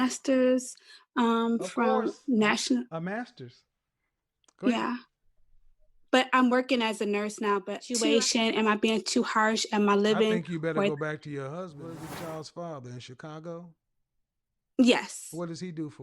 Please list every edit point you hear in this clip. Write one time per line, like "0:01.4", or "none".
0:08.0
0:11.8